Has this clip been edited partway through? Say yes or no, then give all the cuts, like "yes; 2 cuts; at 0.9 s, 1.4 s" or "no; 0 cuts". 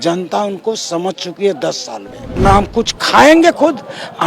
yes; 1 cut; at 2.4 s